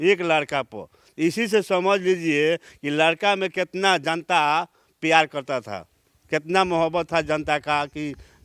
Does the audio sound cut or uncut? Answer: uncut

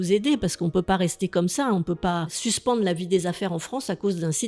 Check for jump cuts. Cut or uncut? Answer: cut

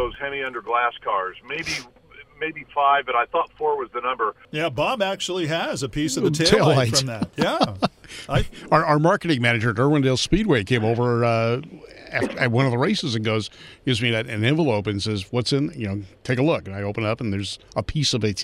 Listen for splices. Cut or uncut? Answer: cut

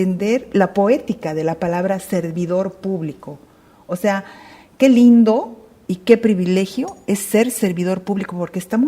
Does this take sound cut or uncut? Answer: uncut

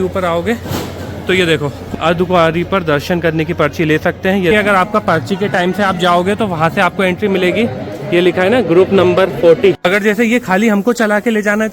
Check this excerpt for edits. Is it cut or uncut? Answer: cut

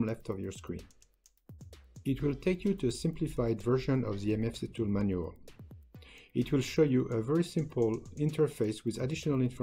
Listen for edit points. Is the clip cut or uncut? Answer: uncut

